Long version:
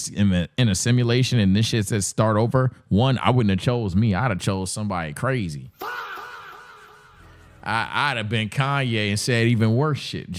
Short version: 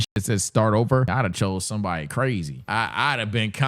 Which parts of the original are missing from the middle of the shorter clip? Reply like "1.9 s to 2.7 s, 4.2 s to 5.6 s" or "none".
2.7 s to 4.2 s, 5.6 s to 7.5 s